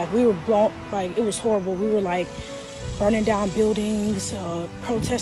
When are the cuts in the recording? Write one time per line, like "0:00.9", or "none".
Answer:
0:02.0